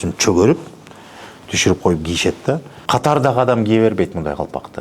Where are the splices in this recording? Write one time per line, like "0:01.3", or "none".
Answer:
0:02.8